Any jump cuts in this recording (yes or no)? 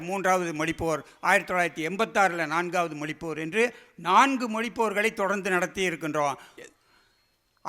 yes